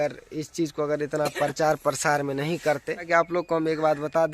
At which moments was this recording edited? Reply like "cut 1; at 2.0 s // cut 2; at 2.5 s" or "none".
cut 1; at 3.1 s

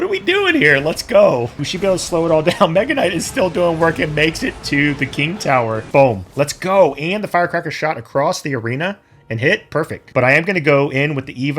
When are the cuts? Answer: cut 1; at 1.6 s // cut 2; at 5.8 s // cut 3; at 10.0 s

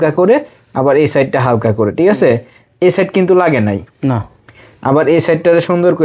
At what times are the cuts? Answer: none

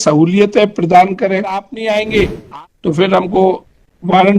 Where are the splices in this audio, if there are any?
cut 1; at 1.7 s

